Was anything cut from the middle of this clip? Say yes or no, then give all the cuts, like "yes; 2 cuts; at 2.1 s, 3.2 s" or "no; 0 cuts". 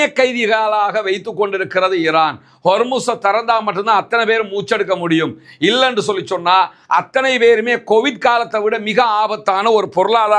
no; 0 cuts